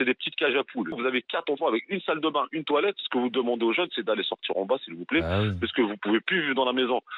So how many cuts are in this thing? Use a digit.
1